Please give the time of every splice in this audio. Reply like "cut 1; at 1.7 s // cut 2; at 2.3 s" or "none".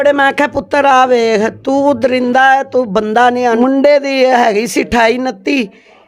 cut 1; at 3.6 s